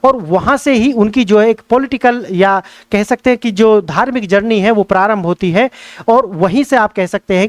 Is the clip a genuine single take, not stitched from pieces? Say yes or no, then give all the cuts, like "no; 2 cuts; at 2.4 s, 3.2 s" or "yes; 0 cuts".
yes; 0 cuts